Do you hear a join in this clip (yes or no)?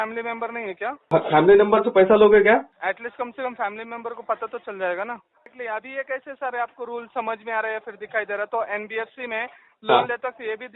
yes